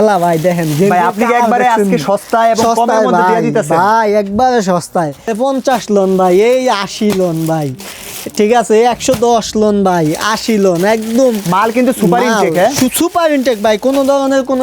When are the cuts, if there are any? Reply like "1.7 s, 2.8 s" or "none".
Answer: 5.3 s